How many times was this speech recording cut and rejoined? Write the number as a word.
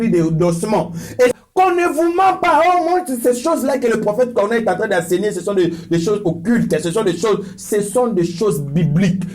one